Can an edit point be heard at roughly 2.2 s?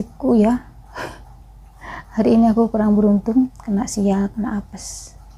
no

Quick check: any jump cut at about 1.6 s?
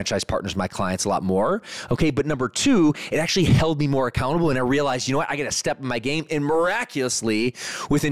no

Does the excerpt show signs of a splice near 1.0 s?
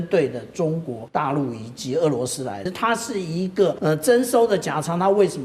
yes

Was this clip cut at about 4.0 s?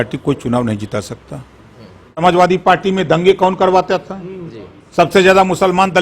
no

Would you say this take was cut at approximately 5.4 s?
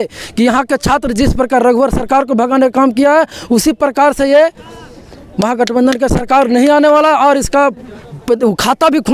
no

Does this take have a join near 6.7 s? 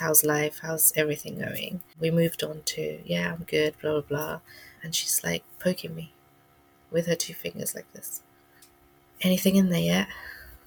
no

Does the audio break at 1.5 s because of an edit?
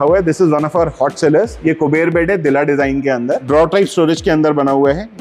yes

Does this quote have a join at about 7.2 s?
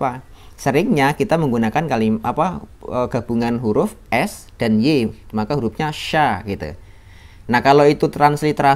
no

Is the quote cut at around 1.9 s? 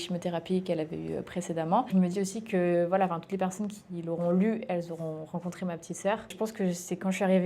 yes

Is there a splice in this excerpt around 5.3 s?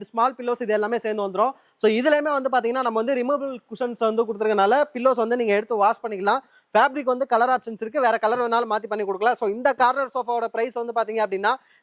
no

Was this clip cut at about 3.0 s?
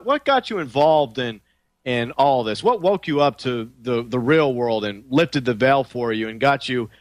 no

